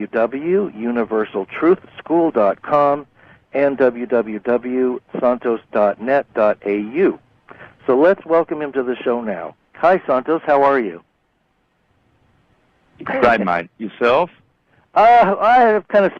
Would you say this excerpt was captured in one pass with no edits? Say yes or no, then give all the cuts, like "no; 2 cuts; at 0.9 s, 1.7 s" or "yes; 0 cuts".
no; 1 cut; at 15.1 s